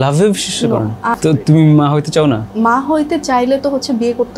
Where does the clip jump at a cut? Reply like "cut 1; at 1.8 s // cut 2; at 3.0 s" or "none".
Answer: cut 1; at 1.2 s // cut 2; at 2.5 s